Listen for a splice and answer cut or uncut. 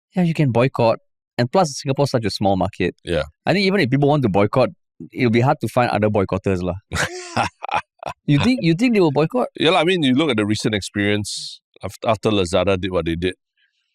cut